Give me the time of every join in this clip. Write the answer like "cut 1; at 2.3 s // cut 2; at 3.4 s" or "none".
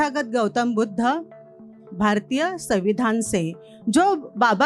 cut 1; at 1.7 s